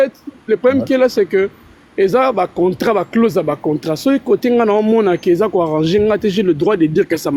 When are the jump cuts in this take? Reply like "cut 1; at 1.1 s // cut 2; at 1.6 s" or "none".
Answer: none

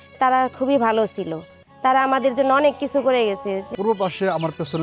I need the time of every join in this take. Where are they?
cut 1; at 3.7 s

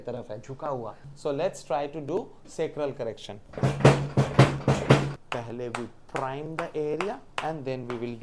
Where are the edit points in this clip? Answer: cut 1; at 1.0 s // cut 2; at 5.1 s

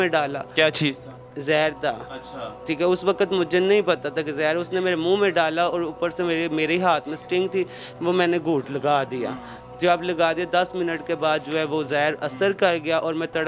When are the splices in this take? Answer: none

